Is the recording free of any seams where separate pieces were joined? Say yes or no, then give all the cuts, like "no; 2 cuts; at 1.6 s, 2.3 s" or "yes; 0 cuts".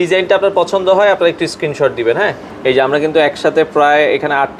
yes; 0 cuts